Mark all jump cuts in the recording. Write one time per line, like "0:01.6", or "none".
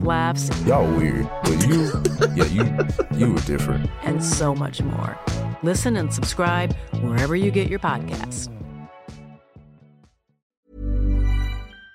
0:10.4